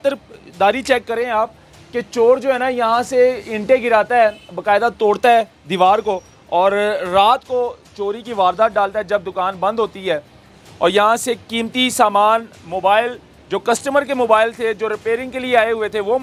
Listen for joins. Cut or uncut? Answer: uncut